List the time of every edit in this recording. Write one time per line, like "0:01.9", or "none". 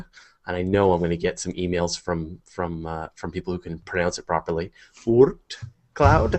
0:02.7